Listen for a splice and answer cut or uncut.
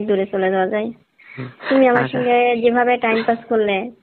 uncut